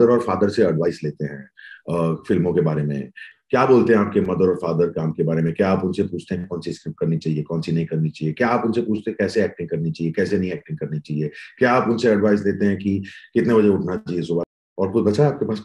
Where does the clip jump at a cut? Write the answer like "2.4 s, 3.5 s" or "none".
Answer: 14.5 s